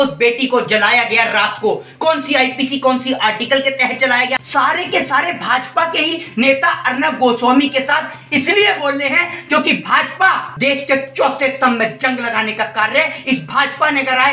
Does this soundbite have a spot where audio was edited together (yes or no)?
yes